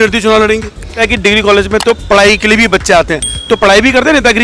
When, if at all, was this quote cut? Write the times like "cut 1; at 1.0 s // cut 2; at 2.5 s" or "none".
cut 1; at 1.0 s